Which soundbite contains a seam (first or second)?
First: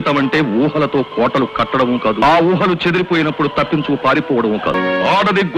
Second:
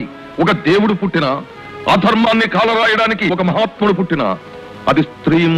first